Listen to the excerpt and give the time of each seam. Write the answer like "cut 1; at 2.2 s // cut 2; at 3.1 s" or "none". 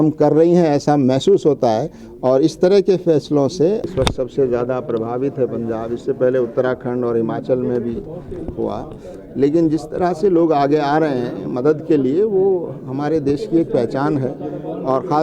cut 1; at 3.9 s